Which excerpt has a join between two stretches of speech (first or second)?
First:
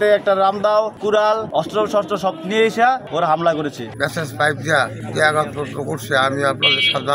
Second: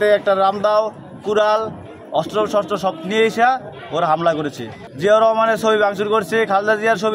first